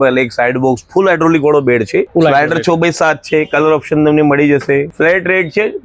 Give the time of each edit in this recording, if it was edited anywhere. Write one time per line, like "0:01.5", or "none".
0:02.1
0:04.9